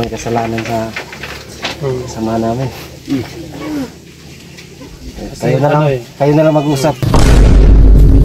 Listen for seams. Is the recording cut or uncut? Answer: cut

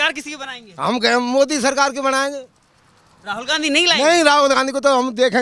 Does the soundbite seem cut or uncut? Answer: uncut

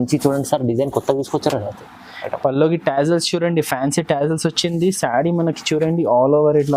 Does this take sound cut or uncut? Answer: uncut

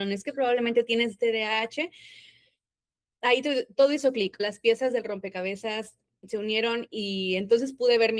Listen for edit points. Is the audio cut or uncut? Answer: cut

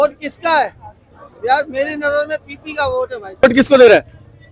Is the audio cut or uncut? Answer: cut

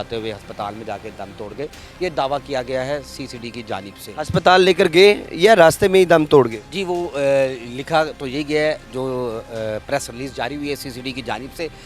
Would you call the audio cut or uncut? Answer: uncut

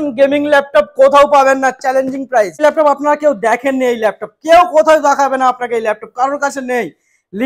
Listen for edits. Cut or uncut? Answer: cut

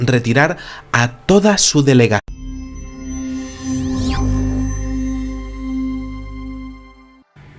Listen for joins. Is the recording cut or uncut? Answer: uncut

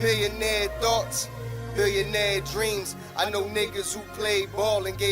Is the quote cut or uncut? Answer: cut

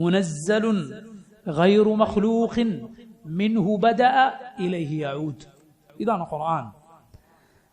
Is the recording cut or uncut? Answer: cut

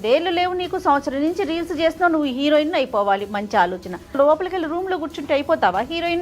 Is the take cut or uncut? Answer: cut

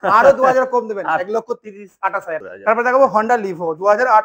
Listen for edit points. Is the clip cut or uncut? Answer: cut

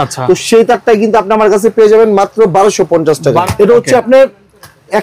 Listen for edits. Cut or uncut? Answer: cut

